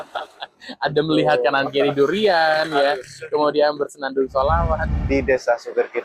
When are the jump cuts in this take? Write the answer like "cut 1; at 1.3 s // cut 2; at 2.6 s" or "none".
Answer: cut 1; at 4.9 s